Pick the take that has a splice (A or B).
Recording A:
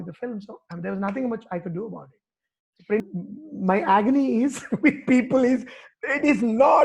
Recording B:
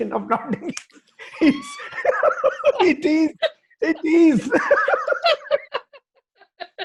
A